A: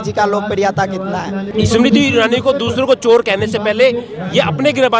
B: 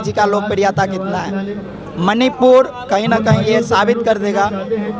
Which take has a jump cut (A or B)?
A